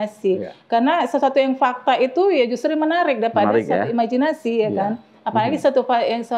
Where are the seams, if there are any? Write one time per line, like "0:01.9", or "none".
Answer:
none